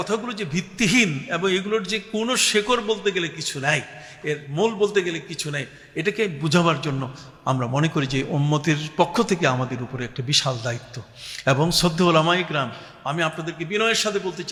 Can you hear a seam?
no; 0 cuts

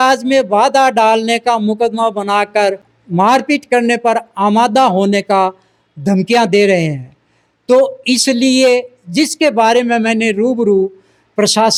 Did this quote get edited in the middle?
no; 0 cuts

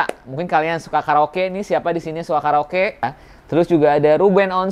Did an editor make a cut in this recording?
yes; 1 cut; at 3.2 s

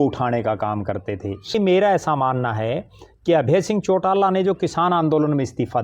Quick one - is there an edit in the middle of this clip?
yes; 1 cut; at 1.5 s

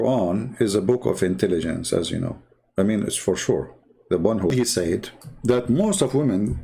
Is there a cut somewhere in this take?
yes; 1 cut; at 4.5 s

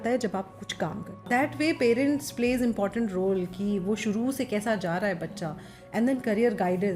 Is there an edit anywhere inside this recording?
yes; 1 cut; at 1.2 s

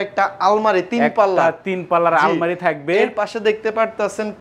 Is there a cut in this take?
no; 0 cuts

